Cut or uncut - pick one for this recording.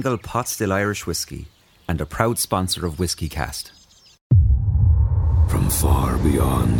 cut